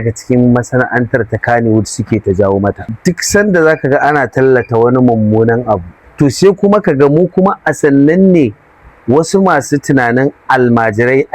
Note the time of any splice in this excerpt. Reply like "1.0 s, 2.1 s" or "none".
2.9 s, 6.0 s

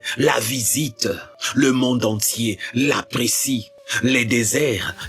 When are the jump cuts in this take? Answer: 1.3 s, 3.8 s

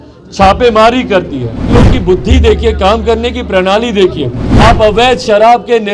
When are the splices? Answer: 1.8 s, 4.4 s

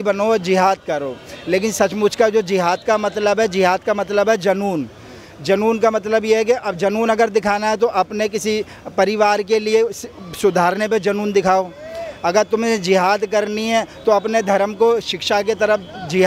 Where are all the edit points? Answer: none

